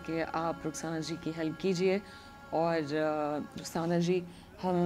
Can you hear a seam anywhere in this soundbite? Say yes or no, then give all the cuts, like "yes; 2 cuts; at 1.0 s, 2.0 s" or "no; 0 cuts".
no; 0 cuts